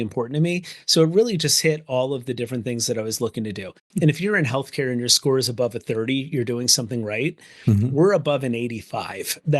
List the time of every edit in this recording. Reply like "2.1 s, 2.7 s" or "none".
3.8 s